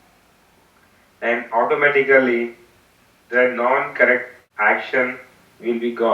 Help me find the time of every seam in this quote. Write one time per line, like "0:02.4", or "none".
0:04.4